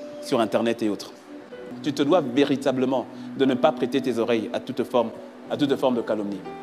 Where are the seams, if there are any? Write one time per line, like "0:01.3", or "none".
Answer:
0:01.7